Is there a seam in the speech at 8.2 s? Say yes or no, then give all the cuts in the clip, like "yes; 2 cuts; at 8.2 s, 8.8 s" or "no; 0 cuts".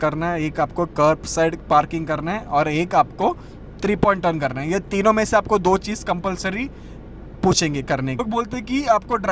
yes; 1 cut; at 8.2 s